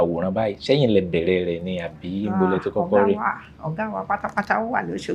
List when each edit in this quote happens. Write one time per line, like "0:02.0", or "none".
none